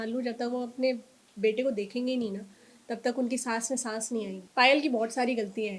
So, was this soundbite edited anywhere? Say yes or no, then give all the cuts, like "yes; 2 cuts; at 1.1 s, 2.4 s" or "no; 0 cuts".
yes; 1 cut; at 4.4 s